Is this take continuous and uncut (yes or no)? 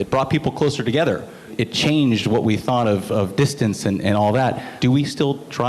no